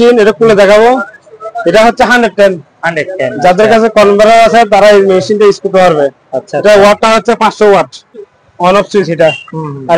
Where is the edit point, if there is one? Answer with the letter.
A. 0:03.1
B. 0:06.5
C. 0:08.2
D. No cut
C